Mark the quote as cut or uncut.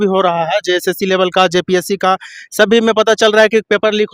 uncut